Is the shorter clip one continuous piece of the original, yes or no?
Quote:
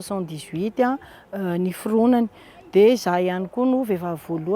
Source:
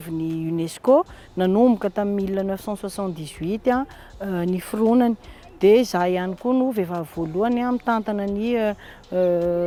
yes